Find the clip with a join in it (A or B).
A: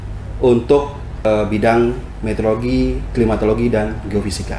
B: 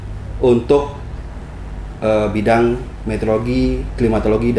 A